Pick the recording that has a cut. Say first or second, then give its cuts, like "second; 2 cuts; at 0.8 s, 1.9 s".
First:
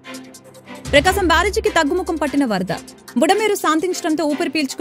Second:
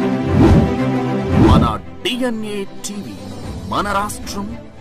first; 1 cut; at 0.9 s